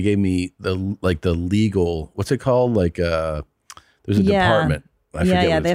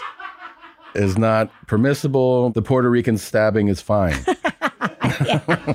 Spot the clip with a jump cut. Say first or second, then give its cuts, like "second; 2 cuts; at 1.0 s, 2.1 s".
second; 1 cut; at 2.5 s